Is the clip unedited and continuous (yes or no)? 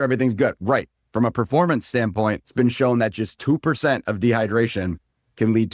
no